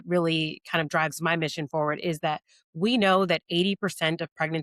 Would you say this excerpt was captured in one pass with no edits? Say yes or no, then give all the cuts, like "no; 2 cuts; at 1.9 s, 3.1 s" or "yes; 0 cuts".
yes; 0 cuts